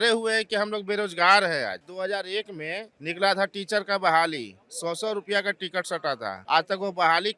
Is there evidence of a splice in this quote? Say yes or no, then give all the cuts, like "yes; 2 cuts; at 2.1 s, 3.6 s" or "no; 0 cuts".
no; 0 cuts